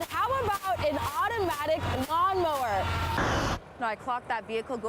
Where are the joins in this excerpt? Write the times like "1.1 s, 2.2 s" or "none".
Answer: 3.1 s